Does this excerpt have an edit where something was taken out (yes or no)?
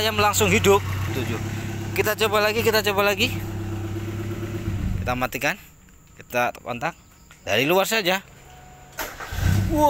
yes